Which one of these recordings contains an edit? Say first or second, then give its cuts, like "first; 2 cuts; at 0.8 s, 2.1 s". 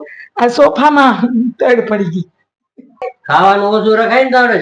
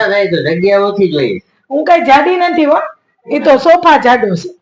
first; 1 cut; at 3.2 s